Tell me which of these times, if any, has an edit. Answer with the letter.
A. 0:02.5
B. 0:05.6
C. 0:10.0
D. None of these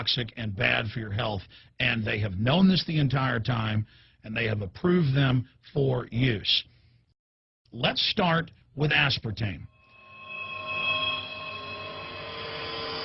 C